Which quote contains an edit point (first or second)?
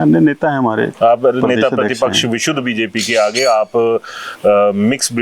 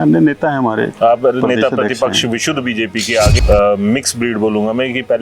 second